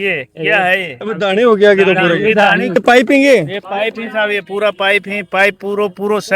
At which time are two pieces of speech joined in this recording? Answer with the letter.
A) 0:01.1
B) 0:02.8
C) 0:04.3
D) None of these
B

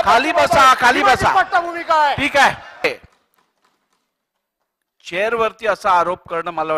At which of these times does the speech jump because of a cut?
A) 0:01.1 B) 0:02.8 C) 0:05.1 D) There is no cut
B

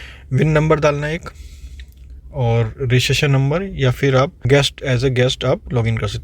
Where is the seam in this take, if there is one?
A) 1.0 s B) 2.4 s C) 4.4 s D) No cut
C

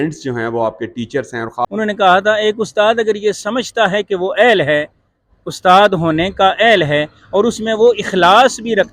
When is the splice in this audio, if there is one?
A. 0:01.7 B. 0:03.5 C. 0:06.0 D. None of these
A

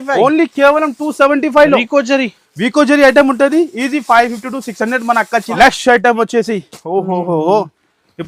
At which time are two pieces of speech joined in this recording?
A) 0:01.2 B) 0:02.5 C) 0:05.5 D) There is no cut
C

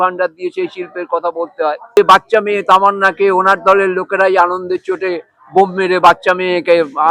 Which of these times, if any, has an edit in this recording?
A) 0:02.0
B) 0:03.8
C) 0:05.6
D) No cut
A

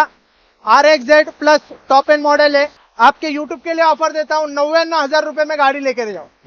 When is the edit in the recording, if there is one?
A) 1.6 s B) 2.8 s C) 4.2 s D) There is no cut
B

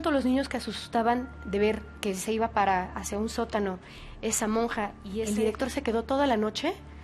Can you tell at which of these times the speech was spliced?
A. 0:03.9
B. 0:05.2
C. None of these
B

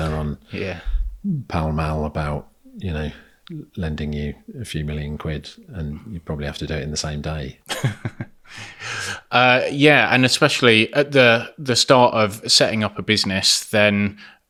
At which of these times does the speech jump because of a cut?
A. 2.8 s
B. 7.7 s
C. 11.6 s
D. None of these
D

